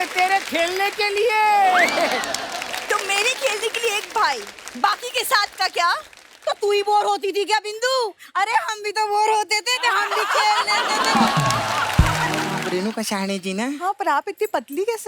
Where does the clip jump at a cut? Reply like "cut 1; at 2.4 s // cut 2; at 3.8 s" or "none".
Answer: cut 1; at 12.6 s

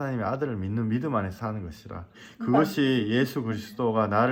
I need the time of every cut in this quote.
cut 1; at 2.2 s

